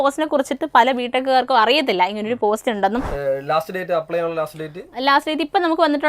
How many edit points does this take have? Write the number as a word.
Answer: one